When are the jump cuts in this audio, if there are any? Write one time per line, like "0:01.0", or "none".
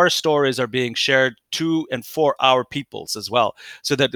none